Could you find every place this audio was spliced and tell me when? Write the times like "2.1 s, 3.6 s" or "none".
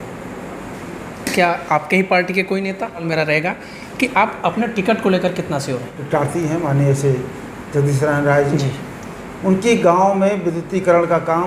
3.0 s, 5.9 s